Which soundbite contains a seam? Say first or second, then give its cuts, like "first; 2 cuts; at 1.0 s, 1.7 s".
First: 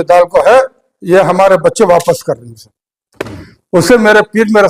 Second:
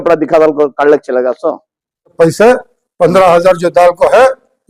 second; 1 cut; at 2.1 s